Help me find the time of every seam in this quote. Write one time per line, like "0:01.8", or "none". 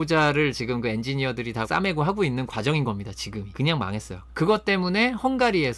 0:01.6
0:03.5
0:04.2